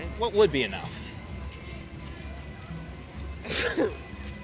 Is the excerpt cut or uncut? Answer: uncut